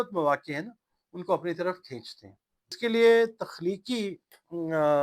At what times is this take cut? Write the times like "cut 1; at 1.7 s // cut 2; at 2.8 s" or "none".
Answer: cut 1; at 2.8 s